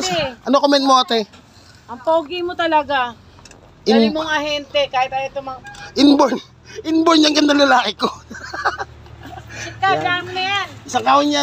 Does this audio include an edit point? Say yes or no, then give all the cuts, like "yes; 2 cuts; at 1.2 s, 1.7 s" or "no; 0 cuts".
no; 0 cuts